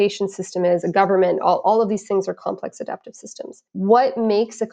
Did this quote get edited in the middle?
yes; 1 cut; at 3.7 s

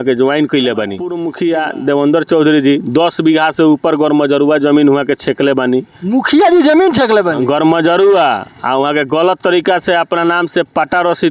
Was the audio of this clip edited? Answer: yes; 1 cut; at 1.2 s

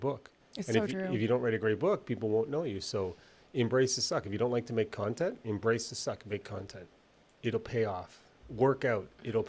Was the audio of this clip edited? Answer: no; 0 cuts

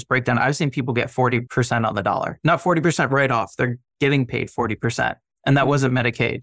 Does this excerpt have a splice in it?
yes; 2 cuts; at 1.5 s, 2.3 s

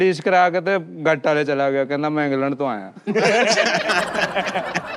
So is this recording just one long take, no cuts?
yes; 0 cuts

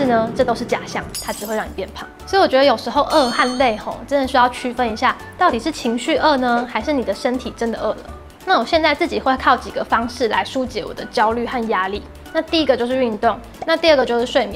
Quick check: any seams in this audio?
no; 0 cuts

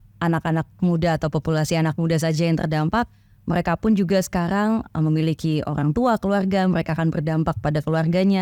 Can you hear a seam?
no; 0 cuts

